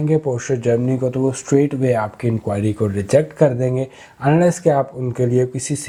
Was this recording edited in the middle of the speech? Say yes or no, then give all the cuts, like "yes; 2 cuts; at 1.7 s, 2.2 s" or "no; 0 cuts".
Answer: no; 0 cuts